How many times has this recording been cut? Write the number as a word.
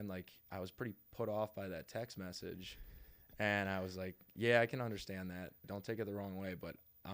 one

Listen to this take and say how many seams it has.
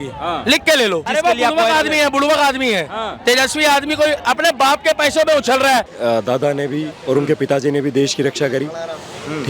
two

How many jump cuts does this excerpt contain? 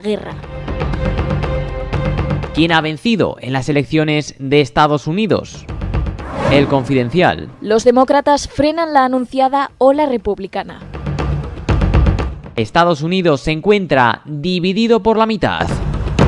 one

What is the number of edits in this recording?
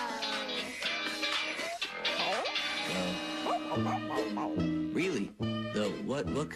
one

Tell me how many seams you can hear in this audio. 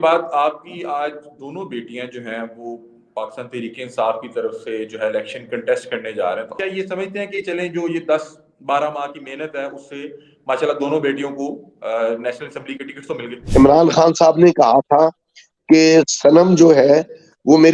two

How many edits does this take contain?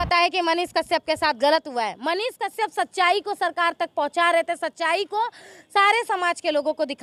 zero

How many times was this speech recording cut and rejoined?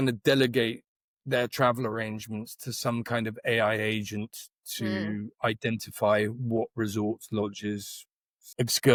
zero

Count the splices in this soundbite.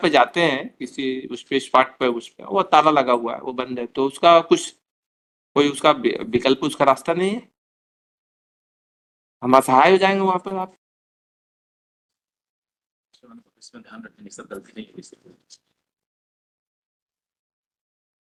zero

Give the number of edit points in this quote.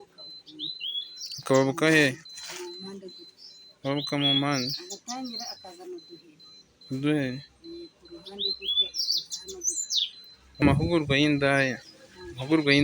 one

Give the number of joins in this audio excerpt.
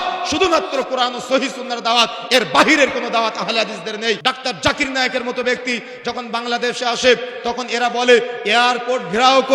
one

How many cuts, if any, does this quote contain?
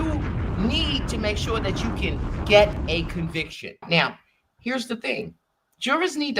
one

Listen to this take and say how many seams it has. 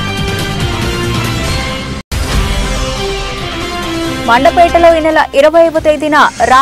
one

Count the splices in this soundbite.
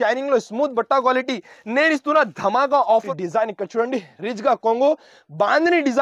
one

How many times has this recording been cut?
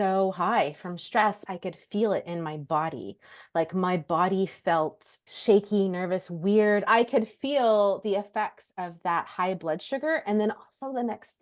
three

